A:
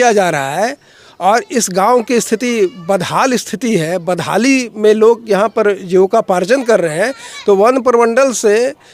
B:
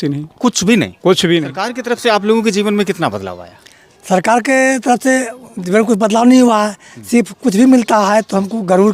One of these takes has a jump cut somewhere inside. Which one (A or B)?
B